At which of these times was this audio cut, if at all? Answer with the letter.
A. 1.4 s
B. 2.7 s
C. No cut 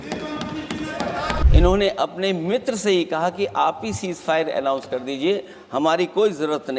A